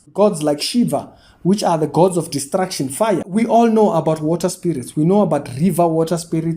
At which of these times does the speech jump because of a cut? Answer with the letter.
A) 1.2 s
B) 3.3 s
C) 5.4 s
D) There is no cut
B